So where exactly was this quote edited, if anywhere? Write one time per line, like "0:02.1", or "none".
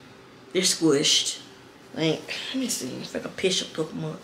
none